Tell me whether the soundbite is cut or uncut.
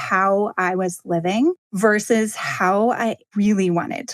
cut